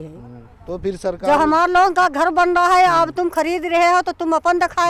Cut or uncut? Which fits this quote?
uncut